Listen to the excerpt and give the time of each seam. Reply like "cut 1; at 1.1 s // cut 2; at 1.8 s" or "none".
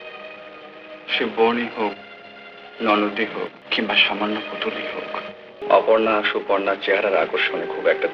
cut 1; at 3.6 s // cut 2; at 5.6 s